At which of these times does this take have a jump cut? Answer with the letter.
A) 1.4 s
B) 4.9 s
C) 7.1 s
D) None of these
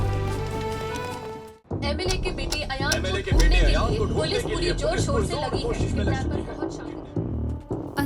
A